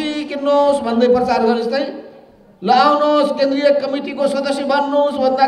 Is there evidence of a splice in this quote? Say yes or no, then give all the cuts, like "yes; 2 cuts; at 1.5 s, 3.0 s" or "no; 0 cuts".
no; 0 cuts